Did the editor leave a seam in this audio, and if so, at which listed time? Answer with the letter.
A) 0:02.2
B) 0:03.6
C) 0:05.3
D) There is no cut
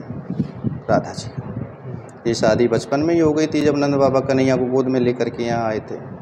D